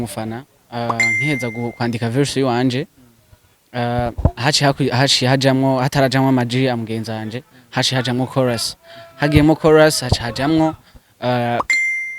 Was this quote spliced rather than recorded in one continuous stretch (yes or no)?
no